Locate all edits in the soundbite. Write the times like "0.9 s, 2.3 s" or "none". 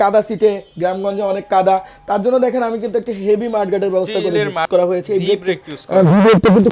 4.7 s